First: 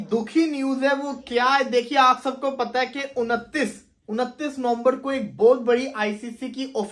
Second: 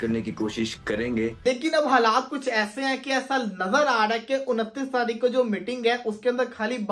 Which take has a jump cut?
second; 1 cut; at 1.4 s

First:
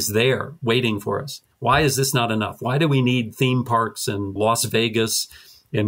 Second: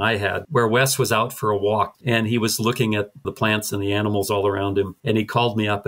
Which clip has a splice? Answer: second; 1 cut; at 2.0 s

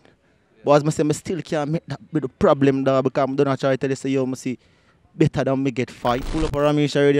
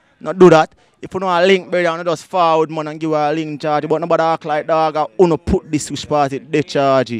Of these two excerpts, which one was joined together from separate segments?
first; 1 cut; at 6.3 s

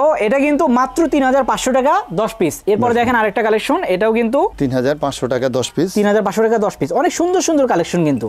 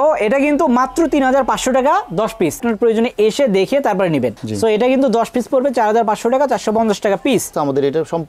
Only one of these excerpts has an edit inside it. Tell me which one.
second; 2 cuts; at 2.6 s, 7.5 s

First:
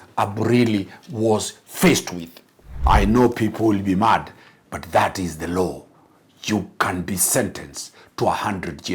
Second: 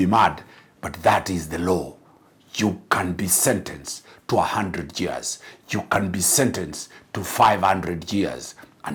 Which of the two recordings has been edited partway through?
first; 1 cut; at 2.7 s

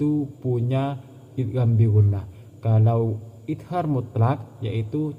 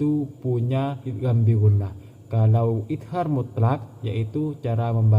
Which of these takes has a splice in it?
second; 2 cuts; at 1.1 s, 2.8 s

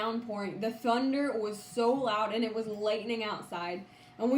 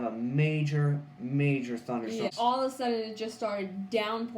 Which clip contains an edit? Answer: second; 1 cut; at 2.3 s

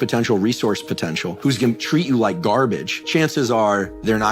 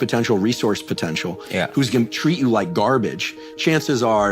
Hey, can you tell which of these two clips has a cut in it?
first; 2 cuts; at 1.4 s, 2.9 s

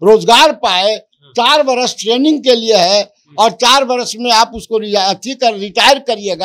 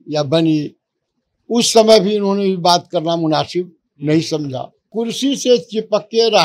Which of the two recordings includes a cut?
second; 1 cut; at 4.9 s

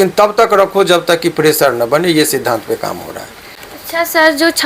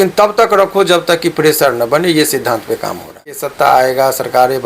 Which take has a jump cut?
second; 1 cut; at 3.4 s

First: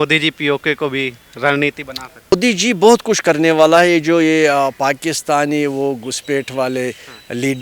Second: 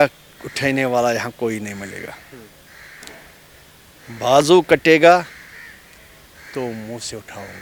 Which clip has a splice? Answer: first; 1 cut; at 2.3 s

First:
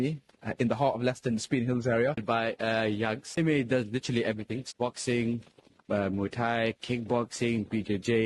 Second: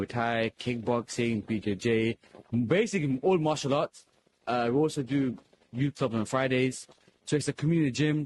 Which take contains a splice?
first; 3 cuts; at 2.2 s, 3.4 s, 4.7 s

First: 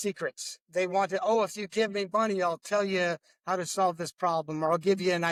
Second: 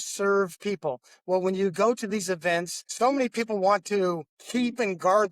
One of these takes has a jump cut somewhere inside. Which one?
second; 2 cuts; at 2.8 s, 4.3 s

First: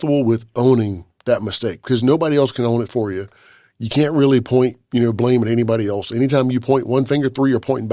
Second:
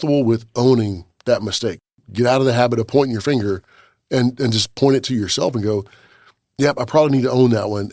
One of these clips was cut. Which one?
second; 1 cut; at 1.9 s

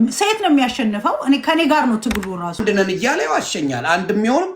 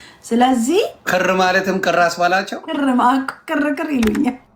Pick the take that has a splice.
first; 1 cut; at 2.6 s

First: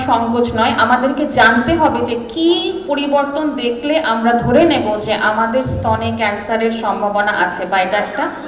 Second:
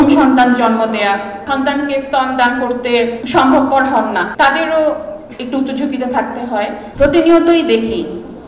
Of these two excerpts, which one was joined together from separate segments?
second; 4 cuts; at 1.4 s, 3.2 s, 4.3 s, 6.8 s

